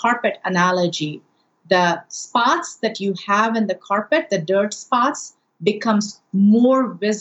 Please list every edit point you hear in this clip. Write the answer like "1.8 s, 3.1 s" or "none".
5.3 s